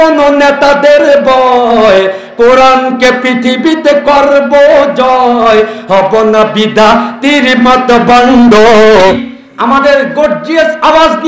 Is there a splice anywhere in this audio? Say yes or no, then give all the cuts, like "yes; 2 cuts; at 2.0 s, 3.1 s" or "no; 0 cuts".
yes; 1 cut; at 9.3 s